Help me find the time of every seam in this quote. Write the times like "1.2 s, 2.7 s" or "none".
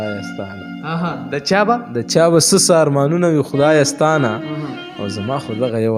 none